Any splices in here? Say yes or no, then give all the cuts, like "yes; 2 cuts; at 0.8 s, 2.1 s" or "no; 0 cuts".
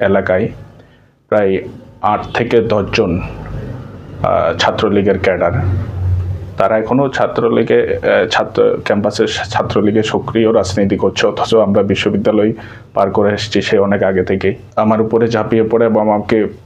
no; 0 cuts